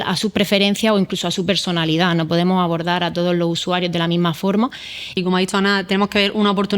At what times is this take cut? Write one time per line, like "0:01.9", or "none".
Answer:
0:05.0